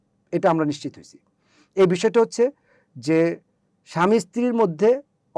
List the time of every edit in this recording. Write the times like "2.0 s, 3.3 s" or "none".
none